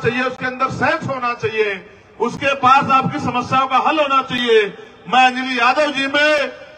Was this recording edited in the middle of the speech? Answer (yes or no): no